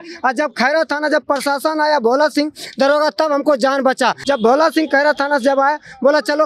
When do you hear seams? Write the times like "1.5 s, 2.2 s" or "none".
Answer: 4.2 s